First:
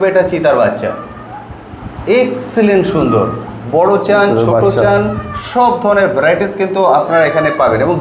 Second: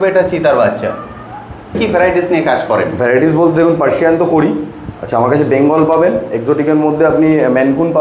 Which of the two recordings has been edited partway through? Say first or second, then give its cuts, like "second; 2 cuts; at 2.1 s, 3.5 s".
second; 1 cut; at 1.8 s